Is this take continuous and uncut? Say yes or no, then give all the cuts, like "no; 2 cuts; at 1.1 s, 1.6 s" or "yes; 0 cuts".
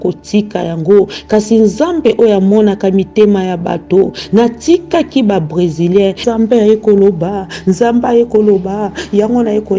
no; 1 cut; at 6.2 s